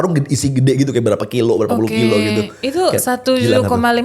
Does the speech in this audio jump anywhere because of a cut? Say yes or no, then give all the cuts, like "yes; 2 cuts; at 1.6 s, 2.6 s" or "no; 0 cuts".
no; 0 cuts